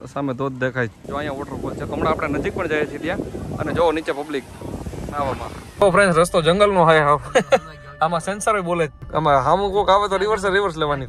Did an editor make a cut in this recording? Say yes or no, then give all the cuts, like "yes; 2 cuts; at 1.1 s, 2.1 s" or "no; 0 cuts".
yes; 3 cuts; at 1.0 s, 5.8 s, 9.0 s